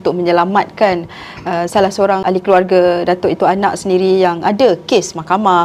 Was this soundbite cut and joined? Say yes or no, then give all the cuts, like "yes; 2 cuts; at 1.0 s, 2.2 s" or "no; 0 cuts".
yes; 1 cut; at 2.2 s